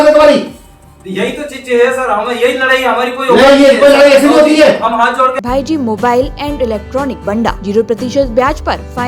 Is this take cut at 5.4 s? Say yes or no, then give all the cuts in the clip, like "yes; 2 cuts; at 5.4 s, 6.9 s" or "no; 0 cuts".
yes; 2 cuts; at 5.4 s, 7.3 s